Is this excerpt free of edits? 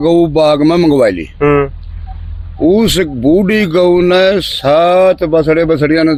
yes; 0 cuts

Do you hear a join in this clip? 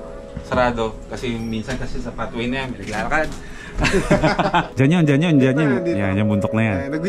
yes; 1 cut; at 4.7 s

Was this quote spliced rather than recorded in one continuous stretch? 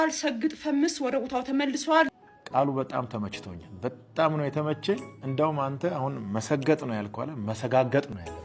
yes; 1 cut; at 2.1 s

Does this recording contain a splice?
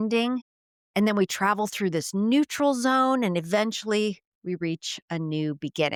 no; 0 cuts

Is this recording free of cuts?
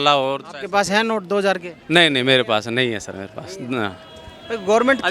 yes; 0 cuts

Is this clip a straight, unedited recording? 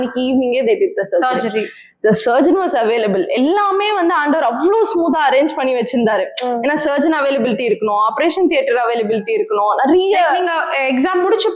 yes; 0 cuts

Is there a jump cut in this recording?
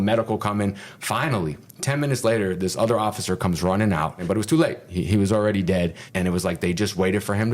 yes; 2 cuts; at 4.2 s, 6.0 s

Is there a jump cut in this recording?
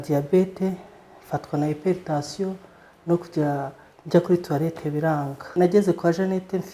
yes; 1 cut; at 5.6 s

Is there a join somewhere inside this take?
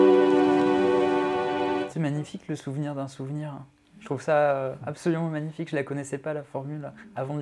yes; 1 cut; at 1.9 s

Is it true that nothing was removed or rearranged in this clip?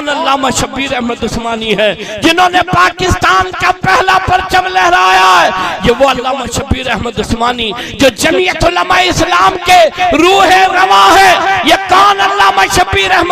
yes; 0 cuts

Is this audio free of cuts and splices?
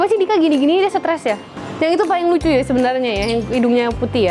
no; 1 cut; at 1.5 s

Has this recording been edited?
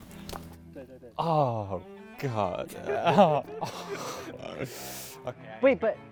no; 0 cuts

